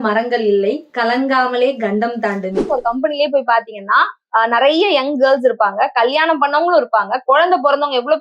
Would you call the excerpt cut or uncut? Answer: cut